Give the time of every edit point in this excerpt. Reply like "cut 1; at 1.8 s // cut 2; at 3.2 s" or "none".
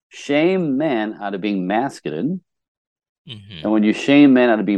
none